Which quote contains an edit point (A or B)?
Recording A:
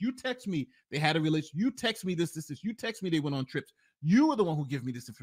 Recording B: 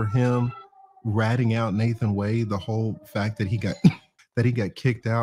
B